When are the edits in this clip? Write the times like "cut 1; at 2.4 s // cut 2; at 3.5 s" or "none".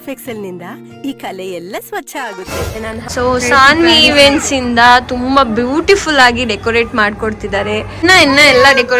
cut 1; at 3.0 s // cut 2; at 8.0 s